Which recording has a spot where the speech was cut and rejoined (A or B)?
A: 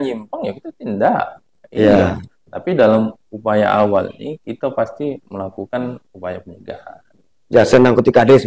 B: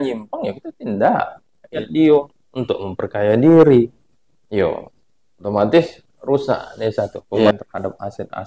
B